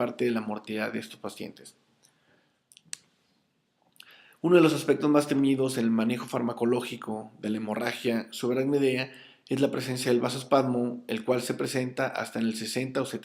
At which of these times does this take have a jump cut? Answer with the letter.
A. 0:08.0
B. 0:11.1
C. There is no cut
B